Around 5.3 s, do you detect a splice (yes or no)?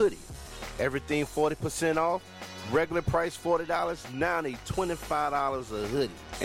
no